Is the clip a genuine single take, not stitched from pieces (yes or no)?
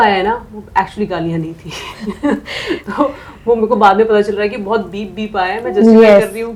yes